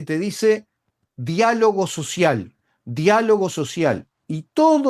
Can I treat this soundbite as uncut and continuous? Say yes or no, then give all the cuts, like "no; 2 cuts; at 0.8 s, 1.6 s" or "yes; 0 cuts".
yes; 0 cuts